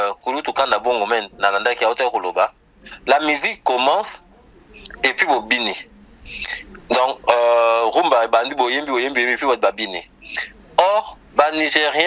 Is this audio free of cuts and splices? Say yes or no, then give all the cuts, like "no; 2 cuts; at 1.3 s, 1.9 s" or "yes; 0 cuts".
yes; 0 cuts